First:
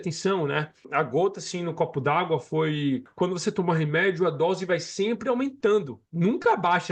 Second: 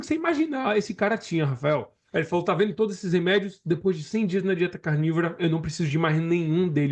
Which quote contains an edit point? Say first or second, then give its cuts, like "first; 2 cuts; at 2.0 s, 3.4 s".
first; 2 cuts; at 0.8 s, 3.1 s